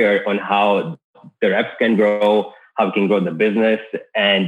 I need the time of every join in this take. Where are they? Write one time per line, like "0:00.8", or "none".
none